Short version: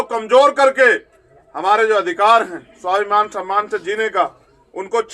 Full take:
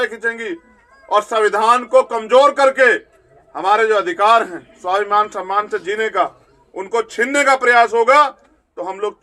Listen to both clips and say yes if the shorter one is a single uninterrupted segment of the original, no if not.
yes